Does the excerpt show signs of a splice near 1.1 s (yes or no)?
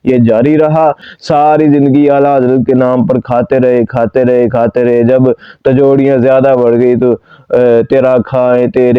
yes